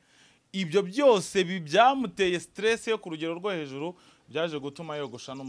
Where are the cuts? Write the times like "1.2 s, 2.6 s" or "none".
none